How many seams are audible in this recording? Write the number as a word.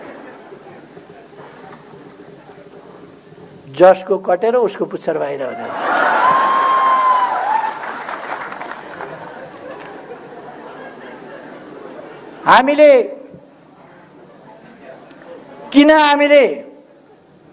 zero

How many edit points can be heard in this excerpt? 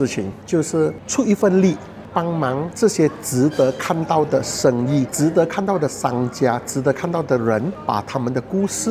zero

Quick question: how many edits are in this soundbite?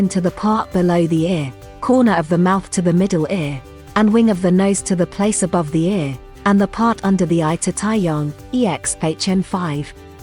zero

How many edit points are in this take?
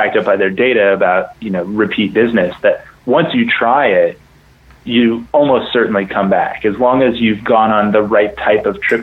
zero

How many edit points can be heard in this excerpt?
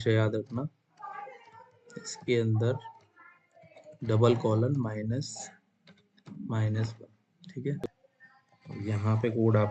one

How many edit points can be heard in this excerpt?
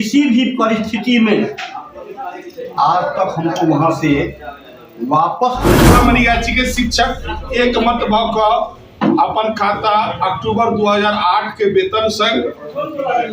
one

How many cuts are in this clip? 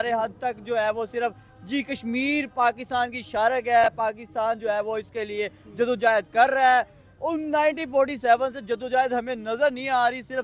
zero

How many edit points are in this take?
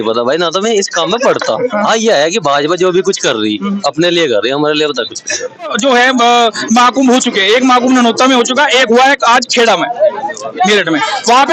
one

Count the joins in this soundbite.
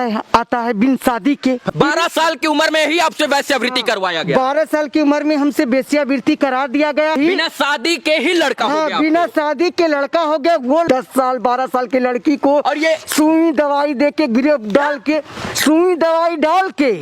three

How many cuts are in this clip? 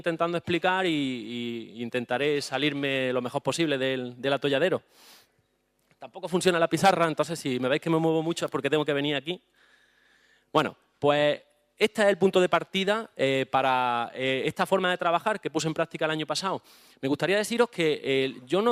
zero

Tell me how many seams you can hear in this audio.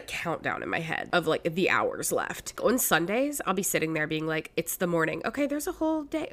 two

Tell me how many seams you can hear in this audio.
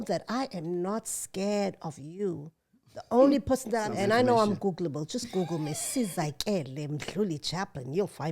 one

